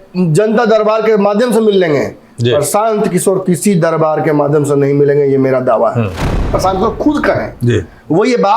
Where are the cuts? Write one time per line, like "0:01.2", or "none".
0:06.5

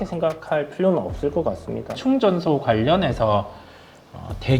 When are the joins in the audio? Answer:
0:02.0

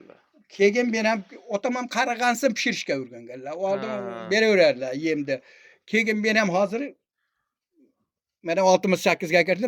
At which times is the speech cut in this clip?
none

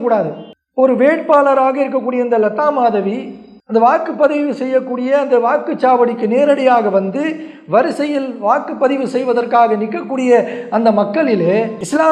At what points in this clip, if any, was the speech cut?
none

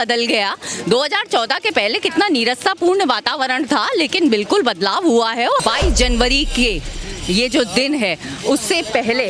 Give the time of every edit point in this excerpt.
0:05.6

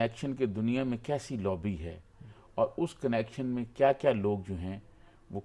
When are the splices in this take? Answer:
none

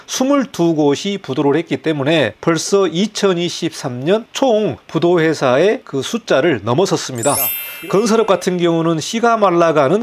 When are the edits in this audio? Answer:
0:02.4
0:04.5
0:05.9
0:07.6

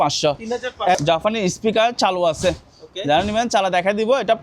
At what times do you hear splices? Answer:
0:00.9

